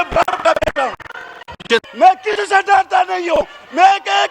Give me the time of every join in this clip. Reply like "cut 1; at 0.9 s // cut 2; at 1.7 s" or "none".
cut 1; at 1.9 s